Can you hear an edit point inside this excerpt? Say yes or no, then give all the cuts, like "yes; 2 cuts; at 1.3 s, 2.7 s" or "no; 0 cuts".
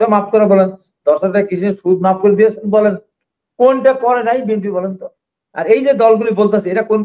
no; 0 cuts